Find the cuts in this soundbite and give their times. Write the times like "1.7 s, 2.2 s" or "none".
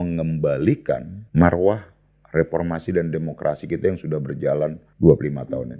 1.2 s, 4.8 s